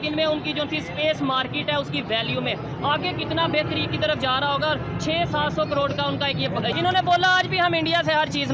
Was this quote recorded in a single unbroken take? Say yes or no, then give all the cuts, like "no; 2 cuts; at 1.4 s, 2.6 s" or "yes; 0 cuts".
no; 1 cut; at 6.7 s